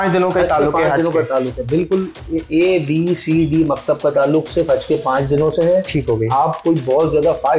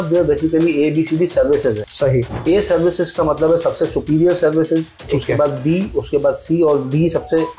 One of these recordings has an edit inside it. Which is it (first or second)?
second